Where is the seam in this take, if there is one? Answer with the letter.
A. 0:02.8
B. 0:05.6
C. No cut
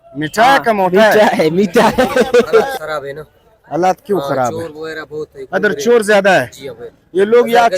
A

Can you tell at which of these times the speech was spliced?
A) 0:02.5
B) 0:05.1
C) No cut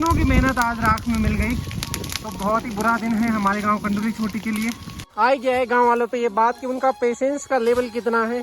B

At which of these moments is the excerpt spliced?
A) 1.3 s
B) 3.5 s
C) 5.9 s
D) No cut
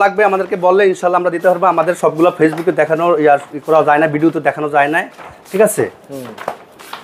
D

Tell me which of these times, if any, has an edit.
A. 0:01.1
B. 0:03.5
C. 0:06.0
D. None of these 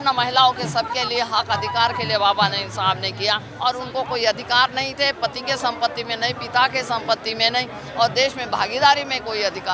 B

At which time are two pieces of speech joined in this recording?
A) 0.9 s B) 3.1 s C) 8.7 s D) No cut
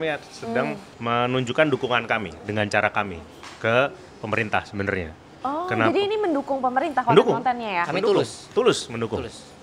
A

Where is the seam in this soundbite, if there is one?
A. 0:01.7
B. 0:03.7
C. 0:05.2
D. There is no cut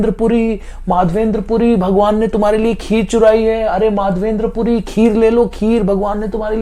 D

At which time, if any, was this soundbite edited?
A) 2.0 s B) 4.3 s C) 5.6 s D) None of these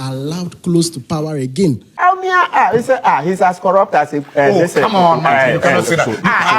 A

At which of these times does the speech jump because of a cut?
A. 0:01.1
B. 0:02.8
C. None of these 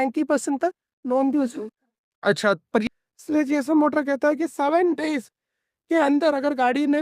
B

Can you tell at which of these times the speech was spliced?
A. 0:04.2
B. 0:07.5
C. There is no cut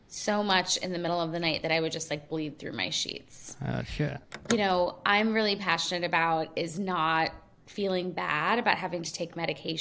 A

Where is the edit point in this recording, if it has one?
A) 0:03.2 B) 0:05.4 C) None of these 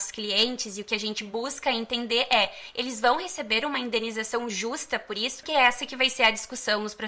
B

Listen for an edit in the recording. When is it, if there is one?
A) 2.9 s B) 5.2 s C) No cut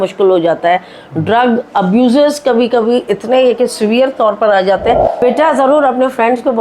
B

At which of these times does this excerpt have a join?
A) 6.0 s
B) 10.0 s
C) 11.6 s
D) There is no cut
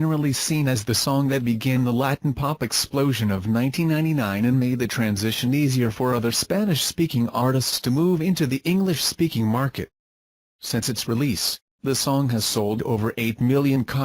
B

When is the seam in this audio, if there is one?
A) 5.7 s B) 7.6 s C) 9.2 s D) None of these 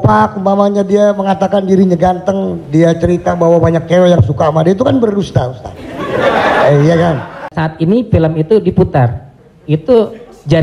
B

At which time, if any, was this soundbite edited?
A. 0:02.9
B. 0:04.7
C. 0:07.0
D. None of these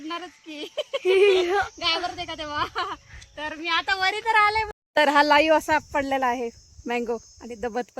B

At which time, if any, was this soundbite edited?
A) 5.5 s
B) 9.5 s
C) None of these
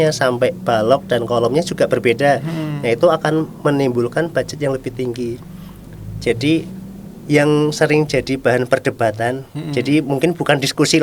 C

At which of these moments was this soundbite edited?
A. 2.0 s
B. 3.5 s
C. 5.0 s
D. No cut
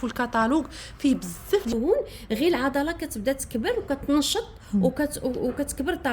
A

